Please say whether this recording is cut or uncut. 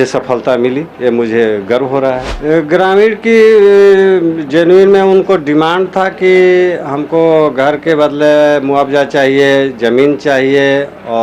cut